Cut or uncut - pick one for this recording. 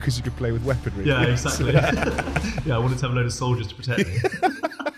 uncut